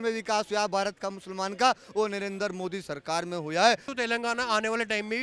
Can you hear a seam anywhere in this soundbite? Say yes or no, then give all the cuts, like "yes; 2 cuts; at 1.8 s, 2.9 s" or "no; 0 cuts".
yes; 1 cut; at 3.9 s